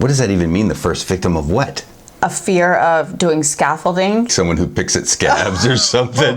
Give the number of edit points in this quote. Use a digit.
2